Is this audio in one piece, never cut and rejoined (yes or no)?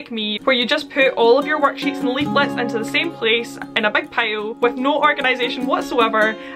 yes